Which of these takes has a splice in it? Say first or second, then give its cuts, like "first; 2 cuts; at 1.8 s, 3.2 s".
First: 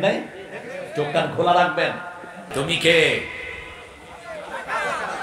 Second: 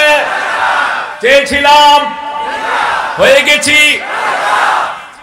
first; 1 cut; at 2.5 s